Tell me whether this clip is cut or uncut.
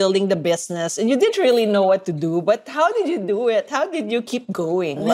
uncut